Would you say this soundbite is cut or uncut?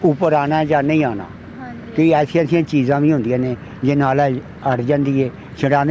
uncut